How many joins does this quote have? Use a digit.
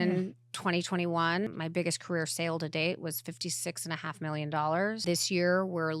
2